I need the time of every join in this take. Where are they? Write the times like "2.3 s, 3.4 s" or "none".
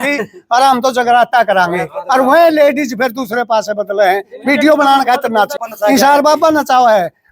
5.6 s